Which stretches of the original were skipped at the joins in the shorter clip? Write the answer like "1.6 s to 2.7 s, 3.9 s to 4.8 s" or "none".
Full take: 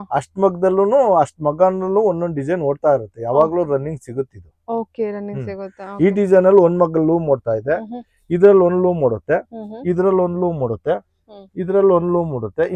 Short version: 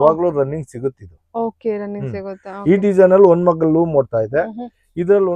none